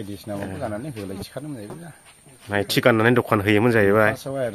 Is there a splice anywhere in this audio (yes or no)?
no